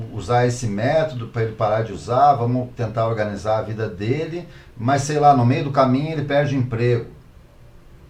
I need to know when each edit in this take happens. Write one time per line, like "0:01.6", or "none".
none